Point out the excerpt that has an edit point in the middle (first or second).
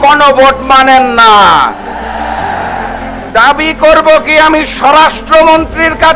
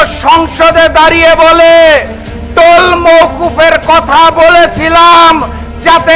first